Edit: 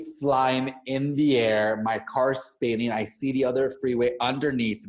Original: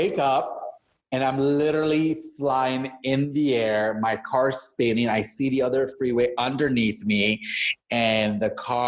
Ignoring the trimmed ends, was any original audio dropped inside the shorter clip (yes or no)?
no